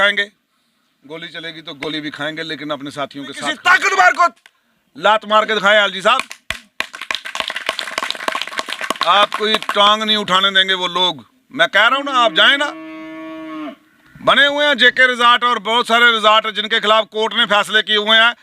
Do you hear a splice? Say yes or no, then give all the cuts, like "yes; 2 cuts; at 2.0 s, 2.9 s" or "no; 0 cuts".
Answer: yes; 1 cut; at 3.5 s